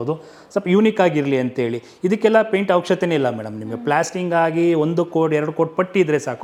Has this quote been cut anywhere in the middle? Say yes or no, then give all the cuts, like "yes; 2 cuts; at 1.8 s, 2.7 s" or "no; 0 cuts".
no; 0 cuts